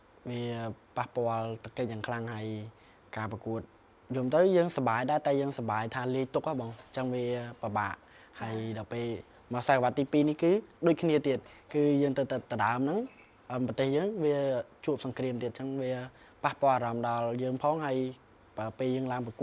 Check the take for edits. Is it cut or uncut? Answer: uncut